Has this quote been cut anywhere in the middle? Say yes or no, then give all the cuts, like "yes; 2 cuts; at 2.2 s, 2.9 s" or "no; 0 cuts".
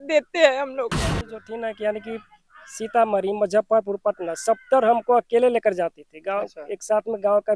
yes; 1 cut; at 1.3 s